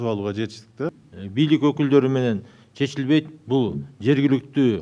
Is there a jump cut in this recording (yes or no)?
yes